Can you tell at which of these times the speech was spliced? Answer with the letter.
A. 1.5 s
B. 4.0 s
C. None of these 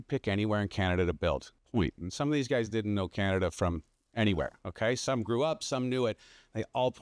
A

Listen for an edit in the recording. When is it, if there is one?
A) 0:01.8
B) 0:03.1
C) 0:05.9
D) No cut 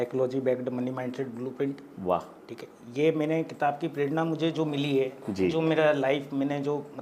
D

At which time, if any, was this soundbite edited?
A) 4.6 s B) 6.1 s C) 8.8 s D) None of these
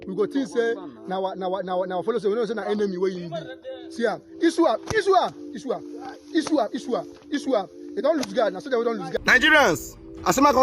C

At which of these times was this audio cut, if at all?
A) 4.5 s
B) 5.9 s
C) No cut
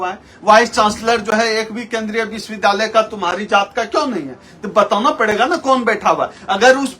C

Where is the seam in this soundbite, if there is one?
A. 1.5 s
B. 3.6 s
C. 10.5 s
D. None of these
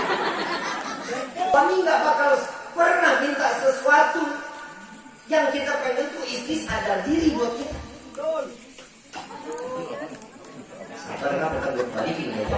A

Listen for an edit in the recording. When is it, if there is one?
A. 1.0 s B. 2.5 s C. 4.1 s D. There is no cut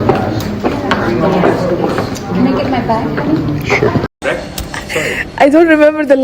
C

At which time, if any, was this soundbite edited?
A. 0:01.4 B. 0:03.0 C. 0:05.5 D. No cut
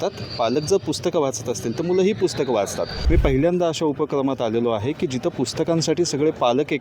B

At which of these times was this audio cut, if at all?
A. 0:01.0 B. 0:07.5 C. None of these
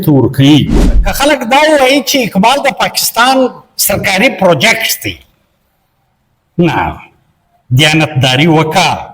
A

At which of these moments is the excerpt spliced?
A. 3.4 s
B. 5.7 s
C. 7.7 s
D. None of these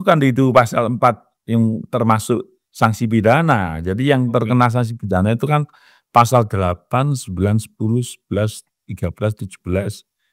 D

